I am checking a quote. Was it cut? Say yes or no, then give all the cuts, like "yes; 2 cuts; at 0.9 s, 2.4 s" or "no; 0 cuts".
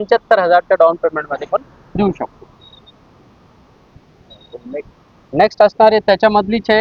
no; 0 cuts